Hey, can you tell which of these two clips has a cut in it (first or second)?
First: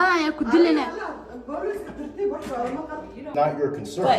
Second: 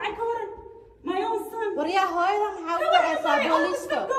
first